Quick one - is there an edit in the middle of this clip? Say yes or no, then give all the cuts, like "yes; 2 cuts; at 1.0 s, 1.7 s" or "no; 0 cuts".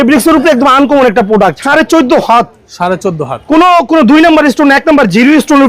yes; 1 cut; at 1.6 s